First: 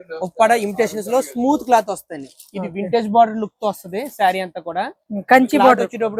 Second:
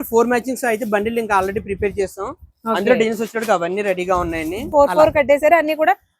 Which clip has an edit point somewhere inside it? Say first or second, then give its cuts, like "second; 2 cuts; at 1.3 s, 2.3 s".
second; 1 cut; at 4.7 s